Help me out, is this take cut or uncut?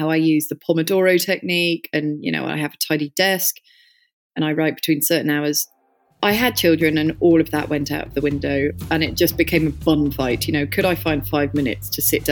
uncut